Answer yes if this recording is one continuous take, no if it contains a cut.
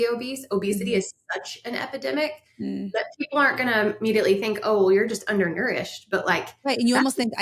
yes